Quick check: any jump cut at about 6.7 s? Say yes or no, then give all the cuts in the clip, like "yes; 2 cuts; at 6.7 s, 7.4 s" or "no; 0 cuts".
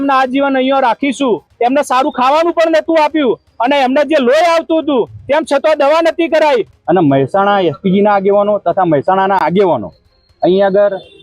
yes; 2 cuts; at 1.5 s, 6.7 s